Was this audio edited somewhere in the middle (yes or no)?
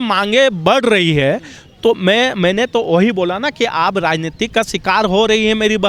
no